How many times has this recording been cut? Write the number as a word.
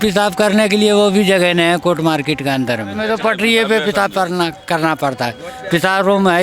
one